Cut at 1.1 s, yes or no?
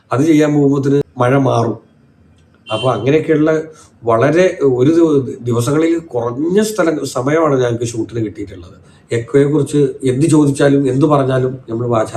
yes